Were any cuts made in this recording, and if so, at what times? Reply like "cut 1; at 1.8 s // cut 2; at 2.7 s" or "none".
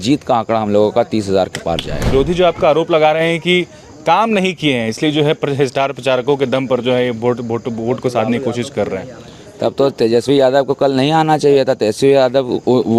cut 1; at 2.0 s